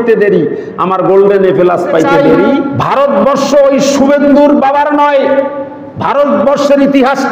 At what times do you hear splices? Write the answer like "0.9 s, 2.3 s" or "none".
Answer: 2.6 s